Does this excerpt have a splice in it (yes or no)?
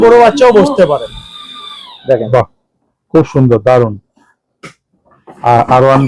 no